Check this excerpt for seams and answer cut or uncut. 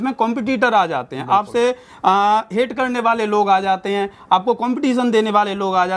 uncut